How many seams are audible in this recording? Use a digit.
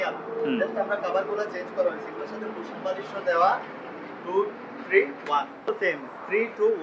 1